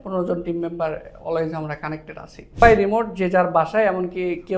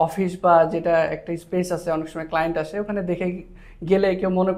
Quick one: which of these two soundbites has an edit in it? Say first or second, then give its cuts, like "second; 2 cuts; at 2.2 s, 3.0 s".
first; 1 cut; at 2.6 s